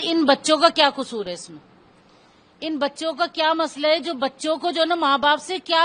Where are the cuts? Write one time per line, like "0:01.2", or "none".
none